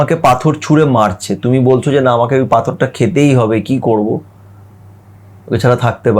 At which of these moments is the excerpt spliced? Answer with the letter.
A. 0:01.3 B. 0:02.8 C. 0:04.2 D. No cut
D